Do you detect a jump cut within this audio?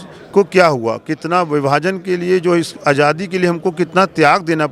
no; 0 cuts

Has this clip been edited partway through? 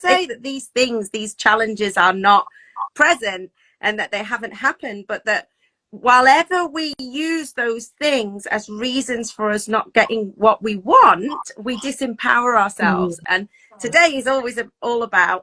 no; 0 cuts

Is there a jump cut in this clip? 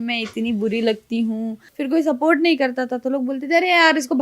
yes; 1 cut; at 1.6 s

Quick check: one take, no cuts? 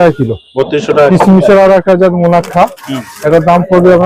no; 1 cut; at 1.1 s

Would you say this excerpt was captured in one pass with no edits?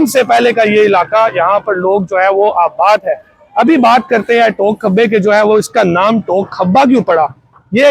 yes; 0 cuts

